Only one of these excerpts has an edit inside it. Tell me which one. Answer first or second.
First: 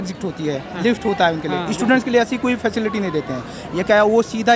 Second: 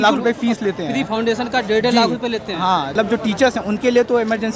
second